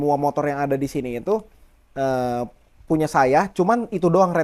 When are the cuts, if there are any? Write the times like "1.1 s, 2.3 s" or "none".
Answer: none